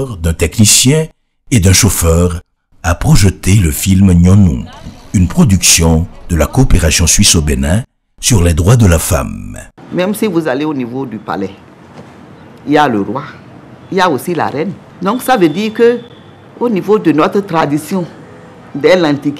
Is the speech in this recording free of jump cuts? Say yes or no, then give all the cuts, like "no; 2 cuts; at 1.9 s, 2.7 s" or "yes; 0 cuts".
yes; 0 cuts